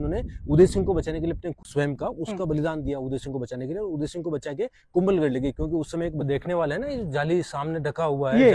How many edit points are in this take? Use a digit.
2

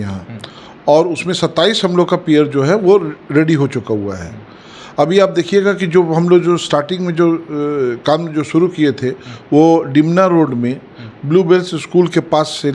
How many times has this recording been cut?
0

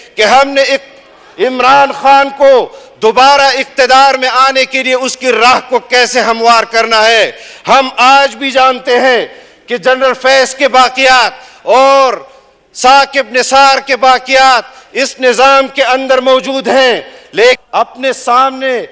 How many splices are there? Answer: 1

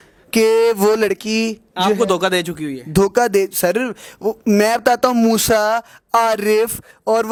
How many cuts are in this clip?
0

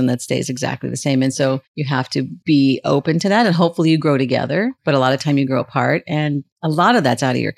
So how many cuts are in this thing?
2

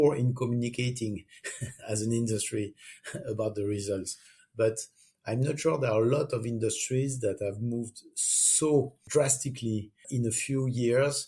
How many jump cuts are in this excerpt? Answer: 2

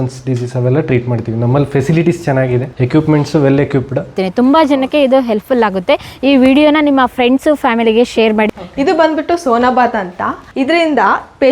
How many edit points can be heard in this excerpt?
4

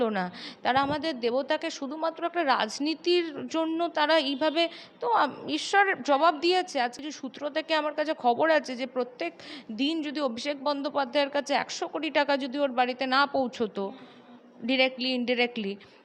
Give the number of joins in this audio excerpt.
1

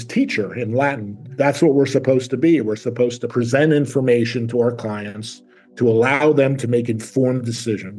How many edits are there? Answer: 2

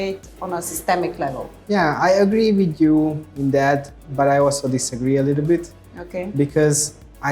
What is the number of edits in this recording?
1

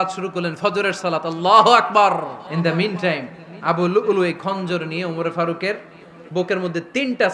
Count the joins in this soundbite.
1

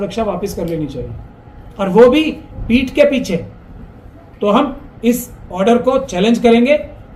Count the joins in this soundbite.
0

